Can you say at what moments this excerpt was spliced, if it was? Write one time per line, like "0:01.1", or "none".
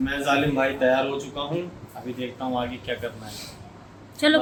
none